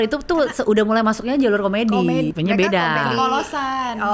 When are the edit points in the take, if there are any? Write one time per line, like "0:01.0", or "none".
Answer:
0:02.3